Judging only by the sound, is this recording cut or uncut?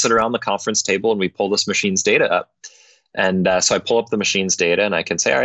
uncut